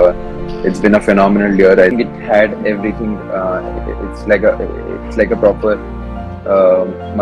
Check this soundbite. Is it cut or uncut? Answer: cut